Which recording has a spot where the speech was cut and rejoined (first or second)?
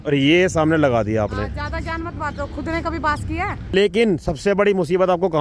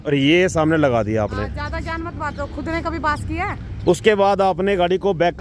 first